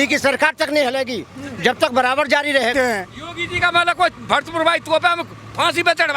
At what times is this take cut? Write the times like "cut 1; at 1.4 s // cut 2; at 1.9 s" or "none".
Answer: cut 1; at 2.7 s